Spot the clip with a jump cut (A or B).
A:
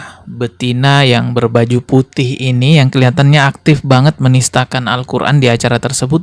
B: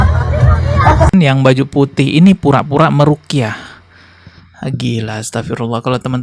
B